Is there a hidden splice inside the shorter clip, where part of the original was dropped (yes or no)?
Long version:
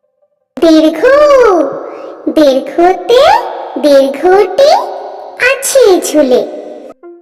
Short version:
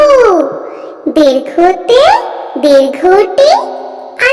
no